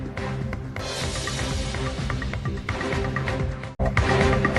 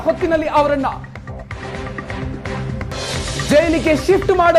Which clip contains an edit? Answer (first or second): first